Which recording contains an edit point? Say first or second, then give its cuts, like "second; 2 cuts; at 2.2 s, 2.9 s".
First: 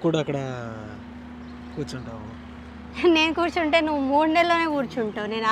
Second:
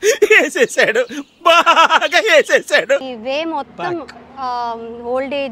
second; 1 cut; at 3.0 s